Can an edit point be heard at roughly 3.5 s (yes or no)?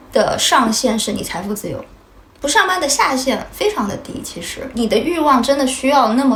no